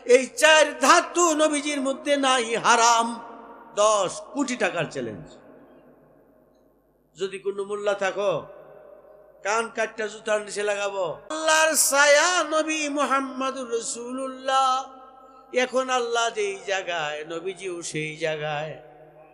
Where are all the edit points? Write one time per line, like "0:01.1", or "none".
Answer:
0:11.4